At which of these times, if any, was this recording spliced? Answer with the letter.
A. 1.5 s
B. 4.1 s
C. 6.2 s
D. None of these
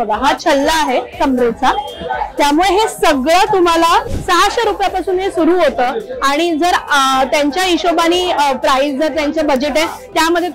B